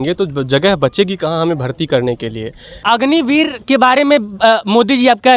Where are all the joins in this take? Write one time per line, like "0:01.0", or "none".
0:02.8